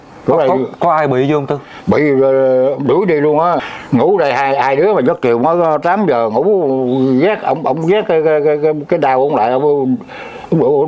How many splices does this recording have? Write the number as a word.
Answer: one